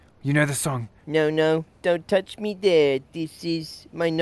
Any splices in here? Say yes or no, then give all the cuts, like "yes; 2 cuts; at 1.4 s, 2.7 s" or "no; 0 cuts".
yes; 1 cut; at 0.9 s